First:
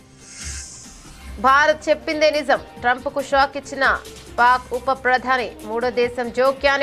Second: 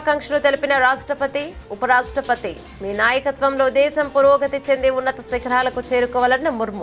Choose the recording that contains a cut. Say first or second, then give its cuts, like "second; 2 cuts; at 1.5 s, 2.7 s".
first; 1 cut; at 1.3 s